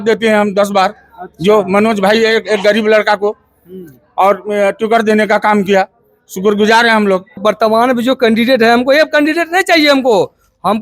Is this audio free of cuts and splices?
no; 1 cut; at 7.4 s

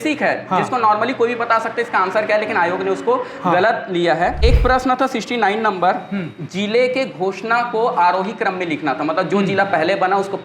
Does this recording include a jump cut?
yes; 1 cut; at 4.4 s

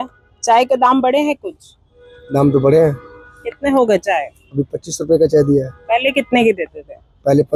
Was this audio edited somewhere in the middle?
no; 0 cuts

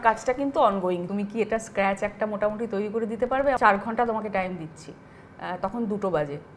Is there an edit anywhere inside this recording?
yes; 2 cuts; at 1.1 s, 3.6 s

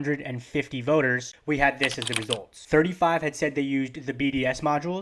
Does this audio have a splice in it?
yes; 2 cuts; at 1.3 s, 2.5 s

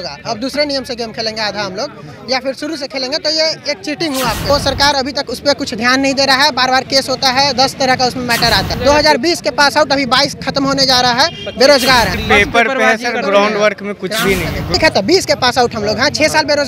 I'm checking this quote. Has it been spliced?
yes; 4 cuts; at 4.5 s, 8.7 s, 12.2 s, 14.7 s

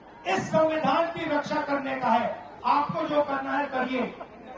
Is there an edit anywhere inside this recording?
yes; 1 cut; at 2.5 s

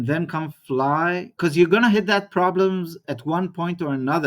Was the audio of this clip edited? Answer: yes; 1 cut; at 1.3 s

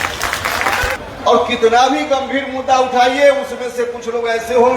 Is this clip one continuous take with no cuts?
no; 1 cut; at 1.0 s

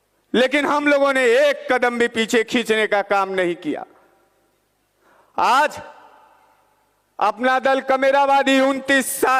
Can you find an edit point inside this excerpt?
no; 0 cuts

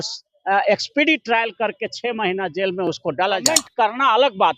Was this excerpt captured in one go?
no; 1 cut; at 3.6 s

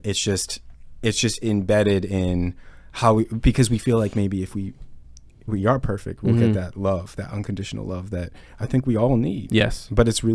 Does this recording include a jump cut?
no; 0 cuts

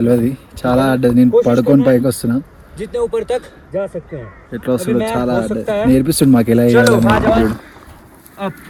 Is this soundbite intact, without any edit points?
yes; 0 cuts

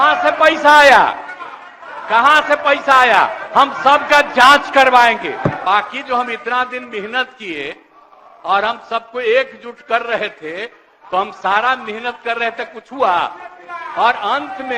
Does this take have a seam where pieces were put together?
yes; 1 cut; at 5.6 s

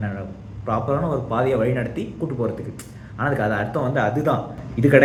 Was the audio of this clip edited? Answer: no; 0 cuts

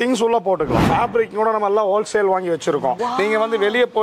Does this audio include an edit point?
yes; 2 cuts; at 0.9 s, 3.0 s

